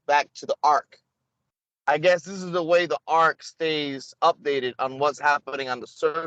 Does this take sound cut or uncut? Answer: uncut